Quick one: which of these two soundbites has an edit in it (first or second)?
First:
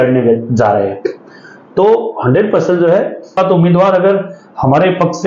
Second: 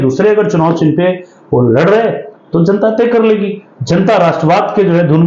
first